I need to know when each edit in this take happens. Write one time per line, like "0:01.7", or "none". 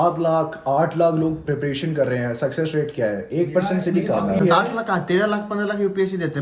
0:04.4